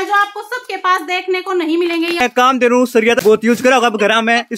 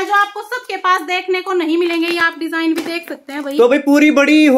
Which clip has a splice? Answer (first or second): first